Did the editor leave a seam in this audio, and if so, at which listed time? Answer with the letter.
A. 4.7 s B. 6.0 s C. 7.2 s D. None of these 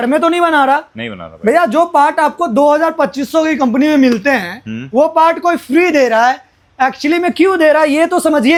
D